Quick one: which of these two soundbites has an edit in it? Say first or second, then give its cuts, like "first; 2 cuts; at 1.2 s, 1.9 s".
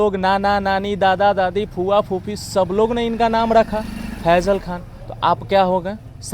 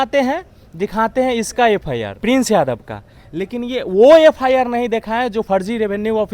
second; 2 cuts; at 2.1 s, 5.5 s